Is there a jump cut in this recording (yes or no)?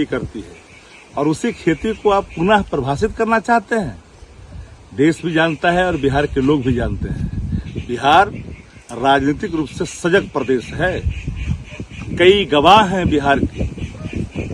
no